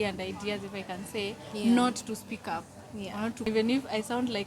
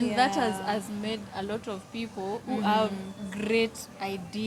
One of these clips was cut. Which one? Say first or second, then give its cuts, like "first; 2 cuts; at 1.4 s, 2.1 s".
first; 1 cut; at 3.5 s